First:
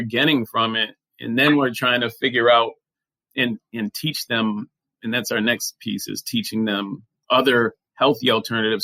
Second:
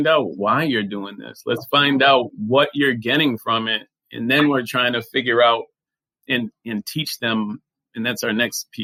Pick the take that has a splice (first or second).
first